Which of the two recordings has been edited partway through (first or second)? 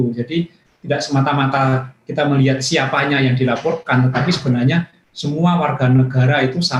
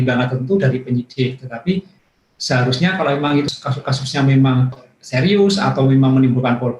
second